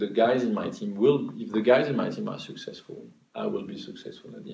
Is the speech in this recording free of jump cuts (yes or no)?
yes